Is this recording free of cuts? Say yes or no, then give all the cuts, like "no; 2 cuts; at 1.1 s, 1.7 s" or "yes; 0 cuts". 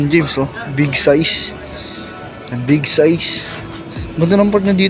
yes; 0 cuts